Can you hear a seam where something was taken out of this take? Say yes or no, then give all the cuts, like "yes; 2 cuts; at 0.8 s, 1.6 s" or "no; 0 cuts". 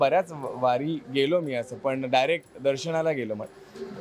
no; 0 cuts